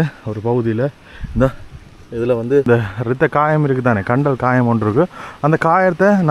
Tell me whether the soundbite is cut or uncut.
cut